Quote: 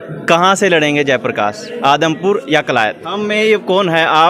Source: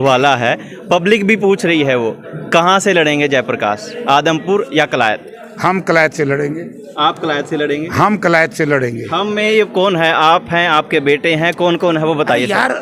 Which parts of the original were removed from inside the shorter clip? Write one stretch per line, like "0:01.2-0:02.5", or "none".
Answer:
0:05.3-0:09.1